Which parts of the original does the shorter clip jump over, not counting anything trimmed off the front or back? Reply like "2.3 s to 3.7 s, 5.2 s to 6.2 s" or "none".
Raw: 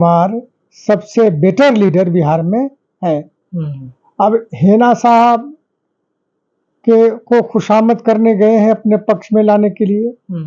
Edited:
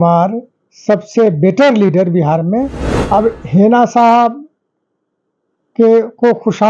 2.8 s to 3.9 s